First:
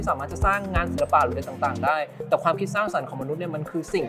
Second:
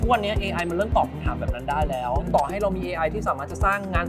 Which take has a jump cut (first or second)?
second